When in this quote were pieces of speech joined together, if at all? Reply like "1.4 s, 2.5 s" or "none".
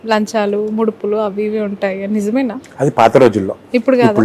none